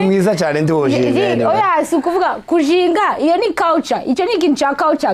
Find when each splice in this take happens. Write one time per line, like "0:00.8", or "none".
none